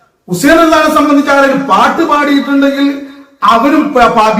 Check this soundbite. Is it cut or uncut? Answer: uncut